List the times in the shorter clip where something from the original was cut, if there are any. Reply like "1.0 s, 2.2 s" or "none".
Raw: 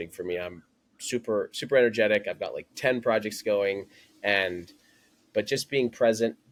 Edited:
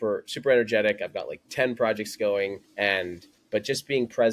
2.9 s